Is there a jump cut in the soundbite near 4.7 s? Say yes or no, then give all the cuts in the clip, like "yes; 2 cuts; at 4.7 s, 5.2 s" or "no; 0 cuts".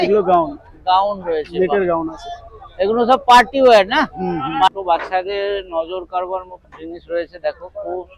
yes; 1 cut; at 4.7 s